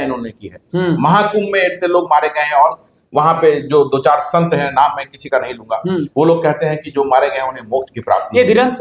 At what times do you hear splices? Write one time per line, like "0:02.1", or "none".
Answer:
none